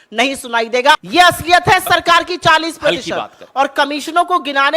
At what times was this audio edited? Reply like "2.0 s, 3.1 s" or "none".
1.0 s